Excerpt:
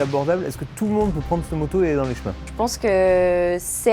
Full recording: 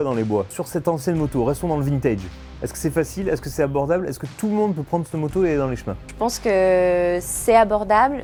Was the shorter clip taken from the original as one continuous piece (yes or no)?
yes